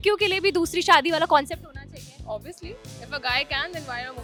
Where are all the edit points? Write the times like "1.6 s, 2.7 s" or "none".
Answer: none